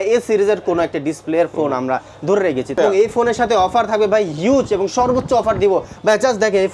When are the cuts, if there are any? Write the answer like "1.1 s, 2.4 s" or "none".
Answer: 2.8 s